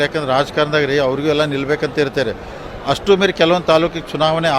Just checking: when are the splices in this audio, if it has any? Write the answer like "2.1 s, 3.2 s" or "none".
2.6 s

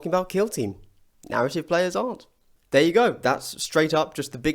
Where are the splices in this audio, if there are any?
none

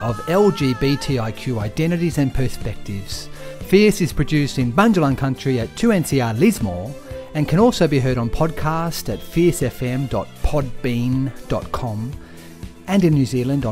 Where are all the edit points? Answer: none

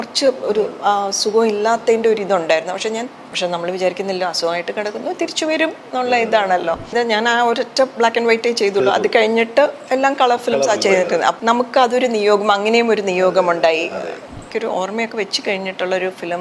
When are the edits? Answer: 3.2 s, 6.9 s, 11.4 s, 14.4 s

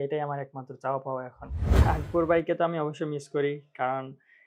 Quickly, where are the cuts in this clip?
1.7 s

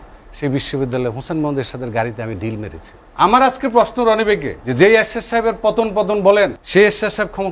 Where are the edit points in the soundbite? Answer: 3.0 s, 4.6 s, 6.6 s

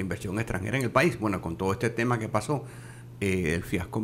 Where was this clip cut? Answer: none

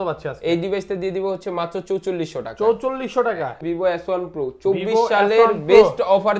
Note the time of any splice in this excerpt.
3.6 s

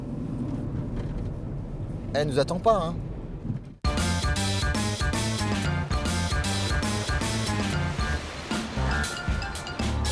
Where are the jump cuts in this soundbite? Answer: 6.0 s

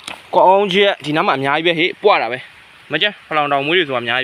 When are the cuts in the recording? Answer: none

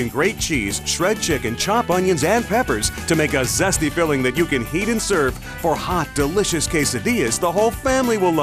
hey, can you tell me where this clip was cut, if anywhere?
none

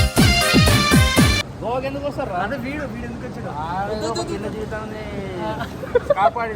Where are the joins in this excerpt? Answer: 1.5 s

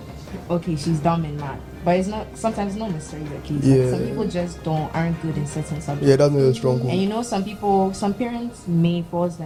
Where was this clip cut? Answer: none

